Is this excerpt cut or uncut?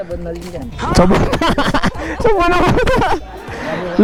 uncut